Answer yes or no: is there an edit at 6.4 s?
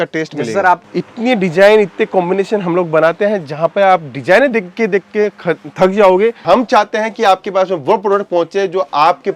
yes